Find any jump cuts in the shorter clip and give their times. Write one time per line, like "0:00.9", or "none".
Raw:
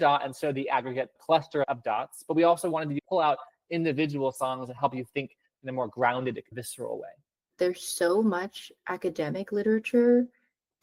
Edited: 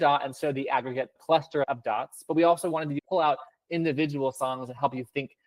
none